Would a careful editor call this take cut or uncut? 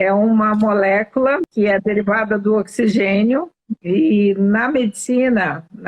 cut